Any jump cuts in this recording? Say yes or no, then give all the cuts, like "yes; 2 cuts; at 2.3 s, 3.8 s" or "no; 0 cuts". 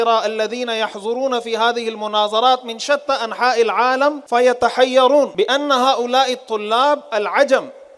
yes; 2 cuts; at 4.2 s, 5.3 s